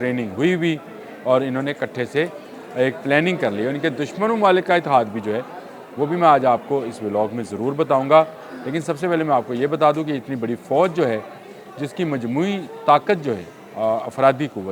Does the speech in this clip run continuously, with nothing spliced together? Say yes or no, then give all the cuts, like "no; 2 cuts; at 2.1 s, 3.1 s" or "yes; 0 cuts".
yes; 0 cuts